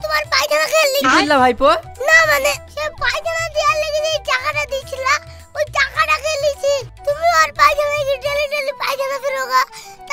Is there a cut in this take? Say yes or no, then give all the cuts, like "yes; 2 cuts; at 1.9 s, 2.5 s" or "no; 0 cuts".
no; 0 cuts